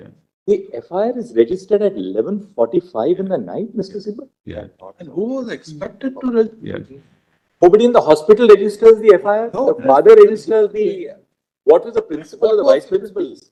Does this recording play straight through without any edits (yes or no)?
yes